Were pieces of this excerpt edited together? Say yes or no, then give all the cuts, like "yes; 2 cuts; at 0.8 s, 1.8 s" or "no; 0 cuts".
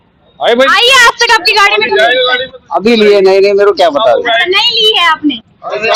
no; 0 cuts